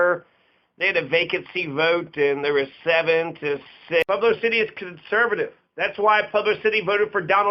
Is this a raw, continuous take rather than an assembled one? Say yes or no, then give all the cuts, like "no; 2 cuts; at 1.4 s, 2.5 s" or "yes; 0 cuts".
no; 1 cut; at 4.0 s